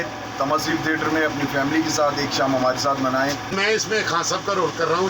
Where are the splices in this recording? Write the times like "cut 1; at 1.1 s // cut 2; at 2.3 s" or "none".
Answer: cut 1; at 3.5 s